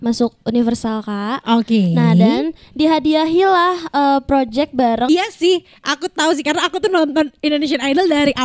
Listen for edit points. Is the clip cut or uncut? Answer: cut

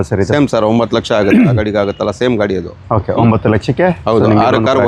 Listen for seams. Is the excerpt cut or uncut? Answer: uncut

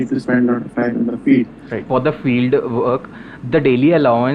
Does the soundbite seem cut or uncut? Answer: cut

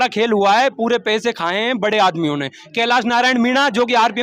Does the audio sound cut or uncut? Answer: uncut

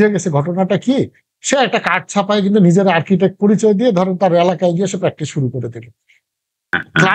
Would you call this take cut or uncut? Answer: uncut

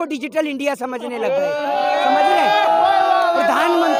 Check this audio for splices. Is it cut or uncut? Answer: uncut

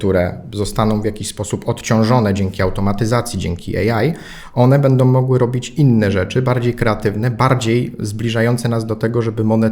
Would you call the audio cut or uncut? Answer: uncut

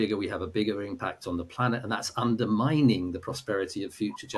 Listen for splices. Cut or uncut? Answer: uncut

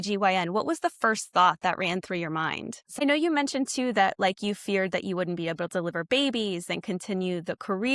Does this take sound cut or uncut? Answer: cut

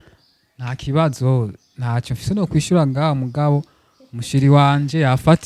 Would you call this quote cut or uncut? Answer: uncut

